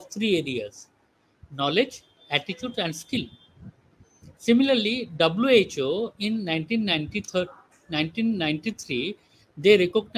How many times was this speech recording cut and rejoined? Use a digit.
0